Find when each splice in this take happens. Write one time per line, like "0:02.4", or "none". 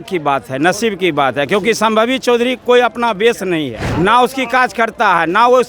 0:03.8